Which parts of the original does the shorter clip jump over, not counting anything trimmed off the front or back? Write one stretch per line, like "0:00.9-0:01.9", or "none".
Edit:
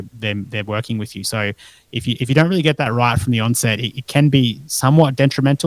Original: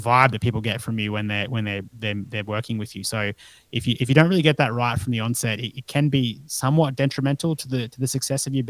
none

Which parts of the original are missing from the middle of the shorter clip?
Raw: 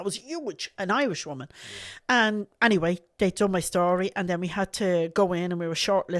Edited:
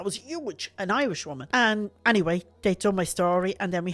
0:01.3-0:01.9

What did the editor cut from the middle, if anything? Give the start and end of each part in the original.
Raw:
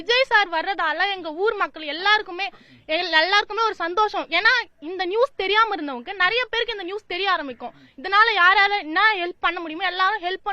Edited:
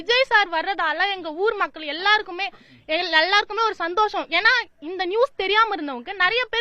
none

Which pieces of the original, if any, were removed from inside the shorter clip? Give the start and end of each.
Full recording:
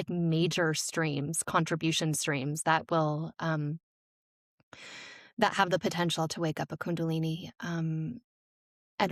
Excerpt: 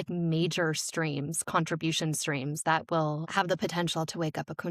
0:03.3-0:05.5

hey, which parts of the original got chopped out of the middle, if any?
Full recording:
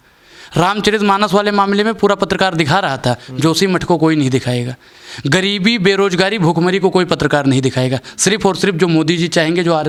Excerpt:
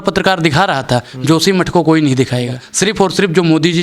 0:04.8-0:08.1

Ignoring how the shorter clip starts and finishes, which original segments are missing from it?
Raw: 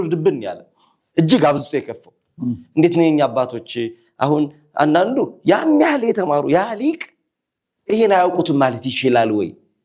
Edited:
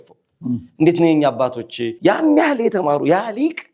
0:03.9-0:05.4

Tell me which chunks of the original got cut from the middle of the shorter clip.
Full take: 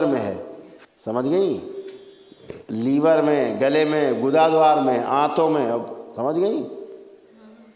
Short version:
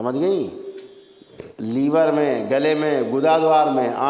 none

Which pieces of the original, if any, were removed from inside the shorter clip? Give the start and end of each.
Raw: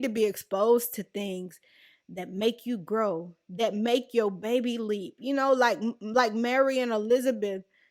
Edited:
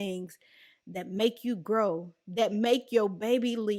none

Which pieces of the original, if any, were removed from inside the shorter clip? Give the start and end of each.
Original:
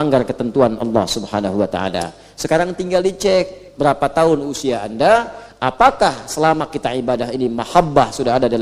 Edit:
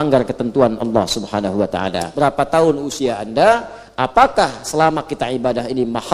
0:02.0-0:03.7

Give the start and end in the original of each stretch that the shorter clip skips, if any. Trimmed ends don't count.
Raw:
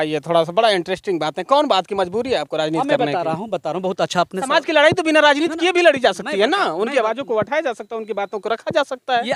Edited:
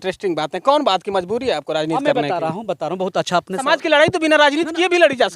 none

